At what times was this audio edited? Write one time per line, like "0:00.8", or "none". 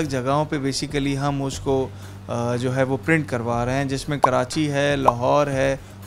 none